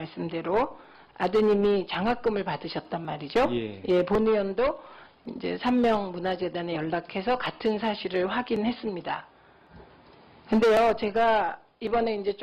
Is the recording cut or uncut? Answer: uncut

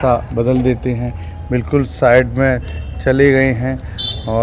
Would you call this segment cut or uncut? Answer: uncut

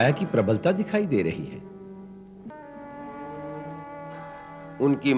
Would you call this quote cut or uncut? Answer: cut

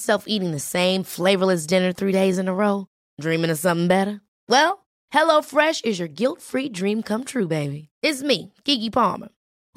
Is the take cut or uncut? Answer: uncut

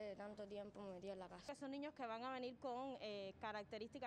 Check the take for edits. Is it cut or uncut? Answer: cut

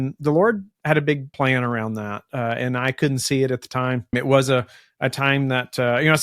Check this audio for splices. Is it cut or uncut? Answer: cut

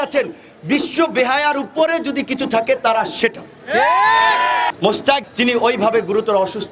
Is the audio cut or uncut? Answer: cut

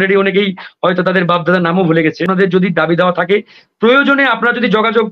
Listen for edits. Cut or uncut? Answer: cut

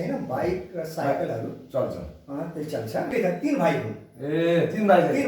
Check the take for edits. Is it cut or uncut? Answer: cut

